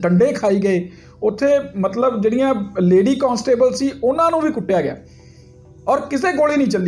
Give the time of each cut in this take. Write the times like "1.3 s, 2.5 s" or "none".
none